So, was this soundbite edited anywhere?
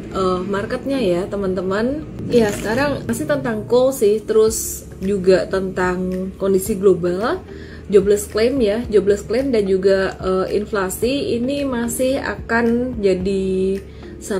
yes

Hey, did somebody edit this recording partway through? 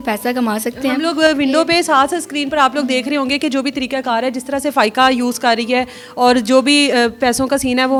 no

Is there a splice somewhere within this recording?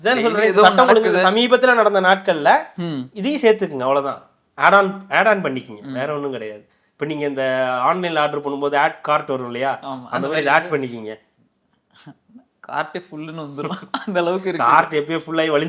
no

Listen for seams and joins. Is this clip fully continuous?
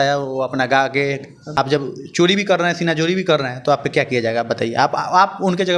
no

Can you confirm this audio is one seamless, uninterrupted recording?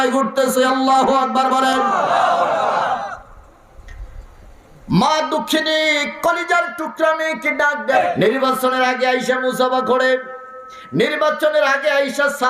no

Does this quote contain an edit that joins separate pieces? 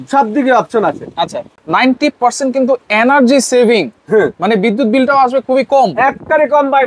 yes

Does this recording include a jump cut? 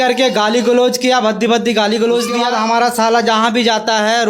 yes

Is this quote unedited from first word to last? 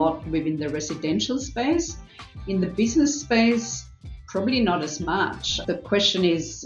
no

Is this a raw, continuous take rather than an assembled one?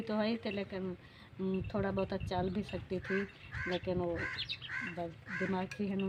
yes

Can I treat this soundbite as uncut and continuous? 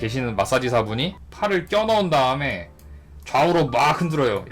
no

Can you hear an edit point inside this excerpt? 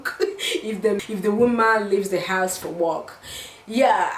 yes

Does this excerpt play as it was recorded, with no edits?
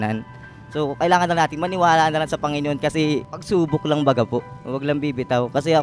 no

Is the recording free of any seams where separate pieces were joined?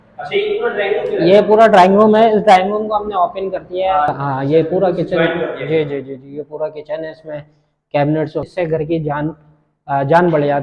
no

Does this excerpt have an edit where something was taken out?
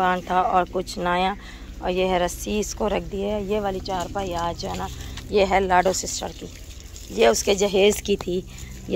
no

